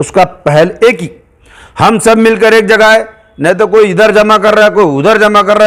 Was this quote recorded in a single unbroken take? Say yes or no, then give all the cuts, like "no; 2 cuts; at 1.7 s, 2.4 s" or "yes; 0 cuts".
yes; 0 cuts